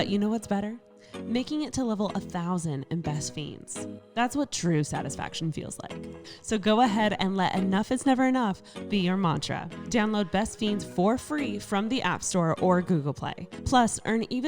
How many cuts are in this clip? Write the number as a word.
one